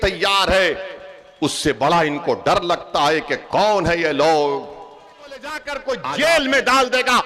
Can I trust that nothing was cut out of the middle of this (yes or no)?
no